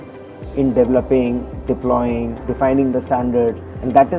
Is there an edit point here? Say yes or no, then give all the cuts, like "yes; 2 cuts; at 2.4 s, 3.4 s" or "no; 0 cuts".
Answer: yes; 1 cut; at 2.4 s